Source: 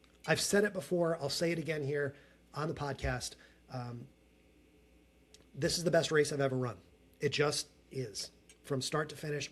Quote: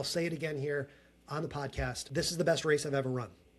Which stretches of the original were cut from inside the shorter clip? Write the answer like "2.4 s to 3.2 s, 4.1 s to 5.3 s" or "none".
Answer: 3.3 s to 5.5 s

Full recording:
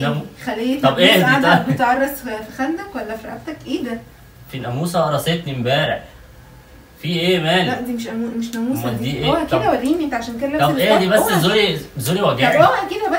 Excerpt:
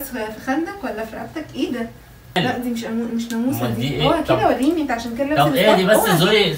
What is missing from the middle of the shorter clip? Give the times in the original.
4.5 s to 7.6 s

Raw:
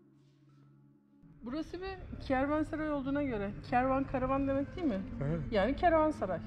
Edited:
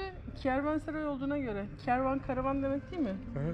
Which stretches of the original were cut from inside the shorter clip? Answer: none

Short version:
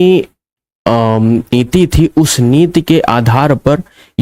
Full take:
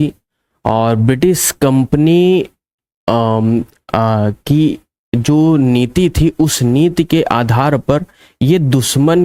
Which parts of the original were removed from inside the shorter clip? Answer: 3.7 s to 5.8 s

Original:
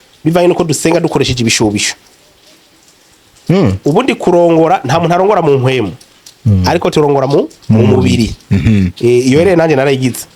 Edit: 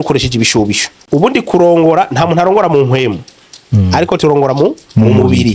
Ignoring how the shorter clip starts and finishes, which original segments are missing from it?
2.1 s to 3.8 s

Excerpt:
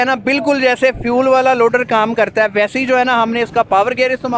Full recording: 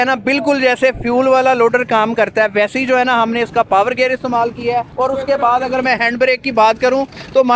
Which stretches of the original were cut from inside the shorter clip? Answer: none

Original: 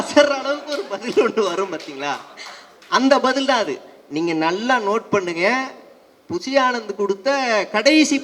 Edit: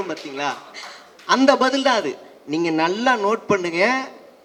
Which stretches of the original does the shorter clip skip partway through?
none

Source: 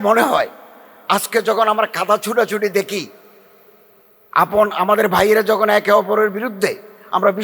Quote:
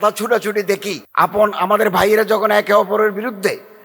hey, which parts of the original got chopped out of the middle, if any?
3.1 s to 4.2 s

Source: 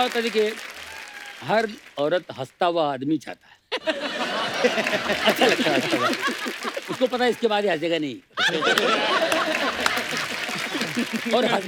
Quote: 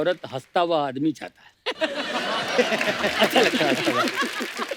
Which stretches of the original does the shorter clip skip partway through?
none

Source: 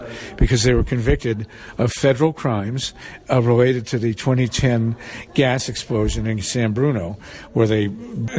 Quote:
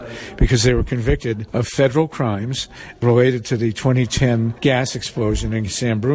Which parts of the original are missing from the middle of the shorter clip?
1.4 s to 1.7 s, 3.3 s to 3.4 s, 5.0 s to 5.3 s

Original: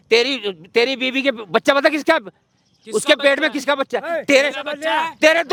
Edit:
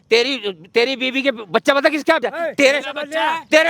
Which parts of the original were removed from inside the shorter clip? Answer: 2.3 s to 4.0 s

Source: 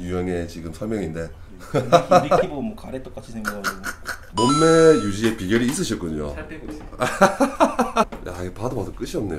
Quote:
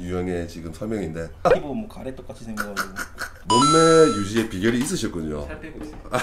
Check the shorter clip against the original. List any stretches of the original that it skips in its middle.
1.4 s to 2.3 s

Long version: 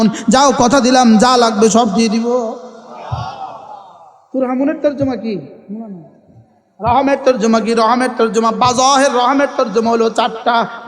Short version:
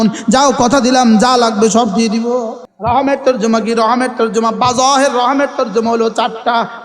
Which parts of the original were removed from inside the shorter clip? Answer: 2.6 s to 6.6 s

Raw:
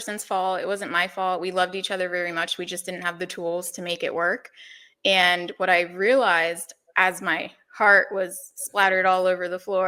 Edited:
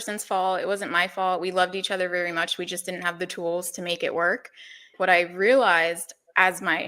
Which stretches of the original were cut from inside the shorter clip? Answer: 4.9 s to 5.5 s

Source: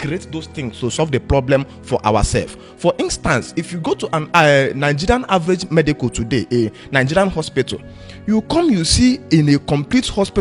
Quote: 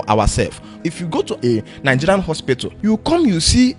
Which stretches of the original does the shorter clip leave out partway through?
2.8 s to 5.9 s, 7.8 s to 8.1 s

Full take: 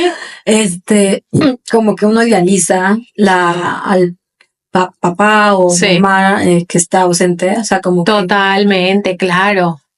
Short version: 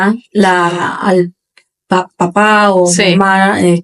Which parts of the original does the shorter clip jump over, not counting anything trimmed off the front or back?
none

